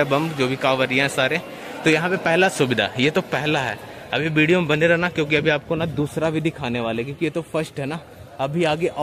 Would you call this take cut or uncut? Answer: uncut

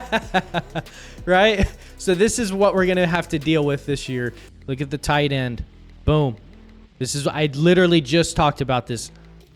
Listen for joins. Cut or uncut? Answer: cut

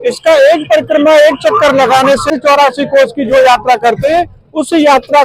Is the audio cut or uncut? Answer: cut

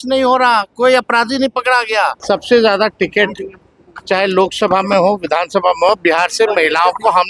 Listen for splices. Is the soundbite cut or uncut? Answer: cut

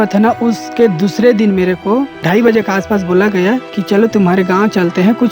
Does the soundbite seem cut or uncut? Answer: cut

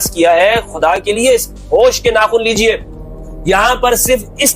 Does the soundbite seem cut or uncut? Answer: uncut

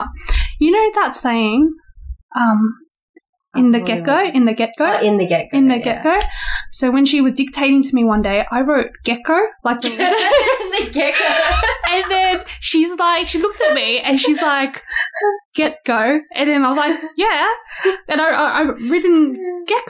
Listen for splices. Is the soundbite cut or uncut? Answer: uncut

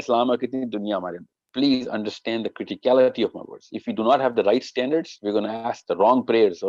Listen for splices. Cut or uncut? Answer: cut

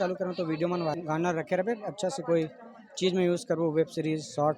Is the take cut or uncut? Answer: cut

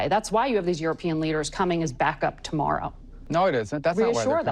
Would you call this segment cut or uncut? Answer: cut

